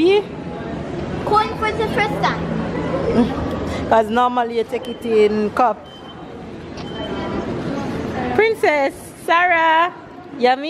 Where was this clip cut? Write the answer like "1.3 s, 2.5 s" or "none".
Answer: none